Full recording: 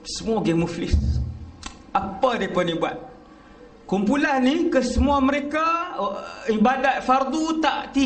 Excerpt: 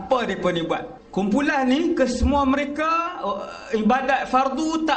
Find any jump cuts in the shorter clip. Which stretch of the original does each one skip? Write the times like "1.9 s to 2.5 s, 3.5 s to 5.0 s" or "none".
3.1 s to 3.7 s